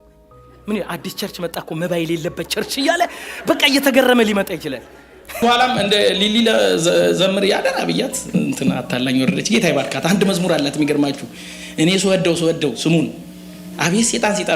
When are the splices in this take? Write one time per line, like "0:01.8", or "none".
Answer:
0:05.4